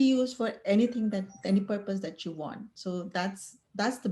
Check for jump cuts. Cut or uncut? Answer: uncut